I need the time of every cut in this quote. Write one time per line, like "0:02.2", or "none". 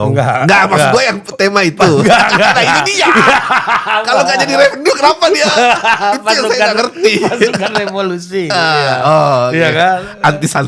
none